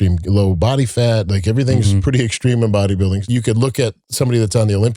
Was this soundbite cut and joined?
yes; 1 cut; at 3.2 s

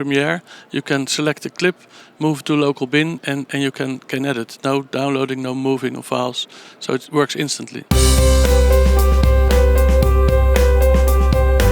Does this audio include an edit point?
yes; 1 cut; at 7.7 s

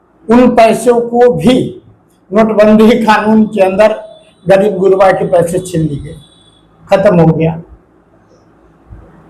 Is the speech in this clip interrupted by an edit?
no; 0 cuts

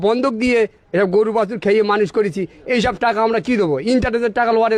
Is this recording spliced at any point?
no; 0 cuts

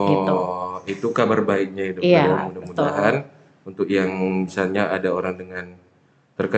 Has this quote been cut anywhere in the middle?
no; 0 cuts

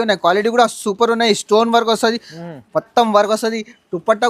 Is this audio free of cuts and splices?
yes; 0 cuts

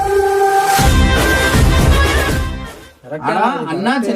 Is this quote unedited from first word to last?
yes; 0 cuts

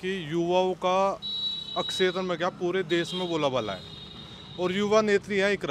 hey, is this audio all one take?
yes; 0 cuts

